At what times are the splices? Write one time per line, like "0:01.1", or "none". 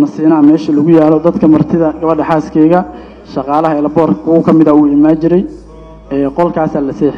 none